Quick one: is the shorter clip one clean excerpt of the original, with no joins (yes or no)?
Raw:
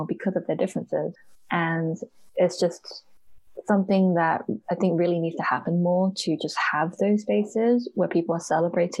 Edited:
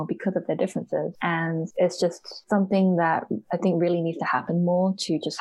no